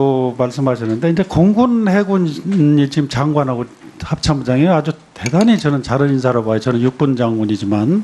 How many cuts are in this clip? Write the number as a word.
one